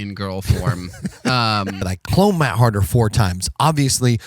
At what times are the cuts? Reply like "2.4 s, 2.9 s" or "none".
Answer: 1.9 s